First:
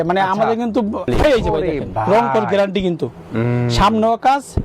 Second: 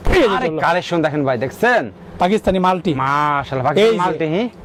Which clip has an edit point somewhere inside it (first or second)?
first